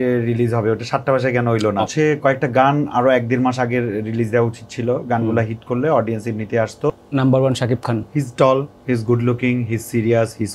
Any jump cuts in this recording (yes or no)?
yes